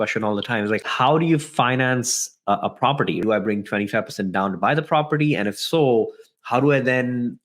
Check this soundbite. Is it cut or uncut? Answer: cut